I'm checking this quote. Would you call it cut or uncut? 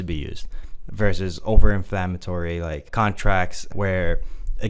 cut